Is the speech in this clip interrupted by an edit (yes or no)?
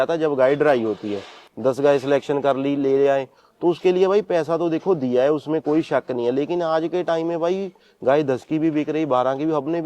yes